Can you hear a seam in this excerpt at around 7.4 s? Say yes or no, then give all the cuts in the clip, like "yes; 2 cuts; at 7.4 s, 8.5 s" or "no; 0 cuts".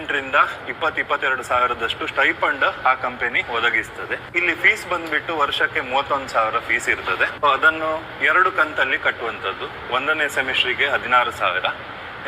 yes; 2 cuts; at 4.3 s, 7.4 s